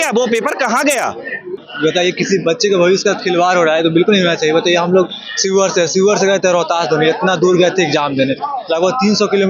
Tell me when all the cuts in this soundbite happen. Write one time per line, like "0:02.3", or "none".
0:01.7

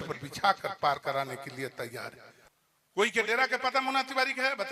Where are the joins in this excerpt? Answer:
0:02.3

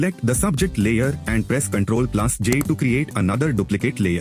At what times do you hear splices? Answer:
none

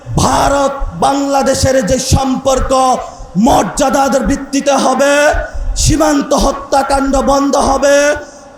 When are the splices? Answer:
none

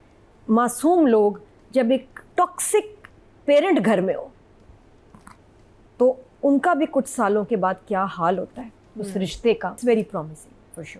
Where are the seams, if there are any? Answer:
0:09.8

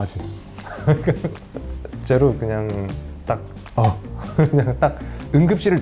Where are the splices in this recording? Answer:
none

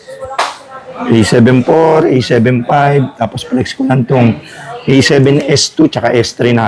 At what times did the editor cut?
none

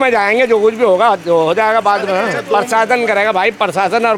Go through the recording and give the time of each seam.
none

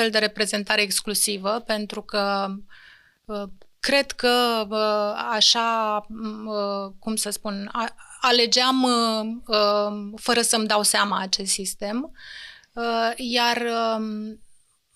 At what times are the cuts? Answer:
none

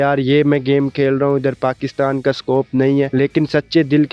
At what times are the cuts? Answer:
0:03.1

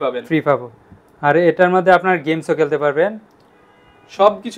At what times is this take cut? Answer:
none

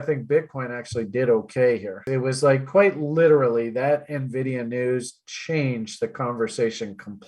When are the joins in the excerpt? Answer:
0:02.0

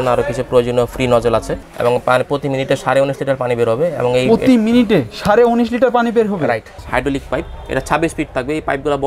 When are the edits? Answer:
0:01.6
0:06.7

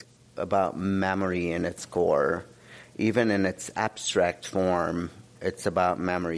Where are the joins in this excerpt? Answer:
none

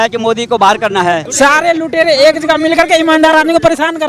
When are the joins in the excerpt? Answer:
0:01.3

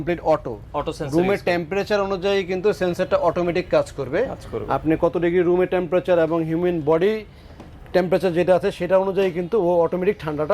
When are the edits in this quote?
none

